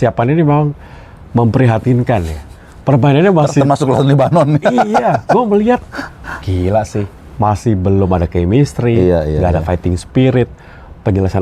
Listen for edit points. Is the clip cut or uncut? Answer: uncut